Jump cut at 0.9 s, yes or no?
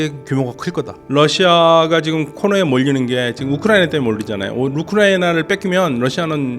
yes